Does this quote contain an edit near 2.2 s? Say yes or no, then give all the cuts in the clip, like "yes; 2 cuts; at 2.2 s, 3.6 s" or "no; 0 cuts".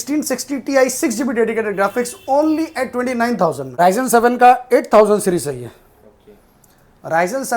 no; 1 cut; at 3.6 s